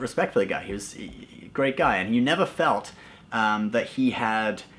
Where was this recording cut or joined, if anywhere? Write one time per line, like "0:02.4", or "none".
none